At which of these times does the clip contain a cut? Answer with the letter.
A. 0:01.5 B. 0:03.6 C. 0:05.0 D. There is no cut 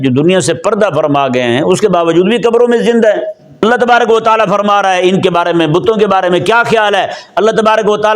B